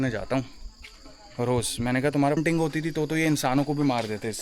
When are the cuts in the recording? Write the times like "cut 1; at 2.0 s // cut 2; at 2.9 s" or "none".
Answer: cut 1; at 2.4 s